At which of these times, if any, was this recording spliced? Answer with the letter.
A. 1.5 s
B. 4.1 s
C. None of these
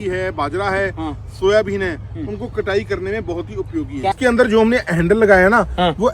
B